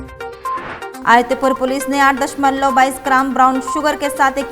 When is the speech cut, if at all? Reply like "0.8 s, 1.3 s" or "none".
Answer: 0.9 s